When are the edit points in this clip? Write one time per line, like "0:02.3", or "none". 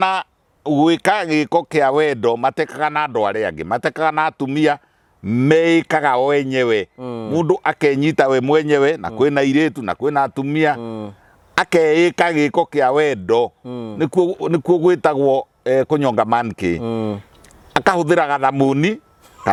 none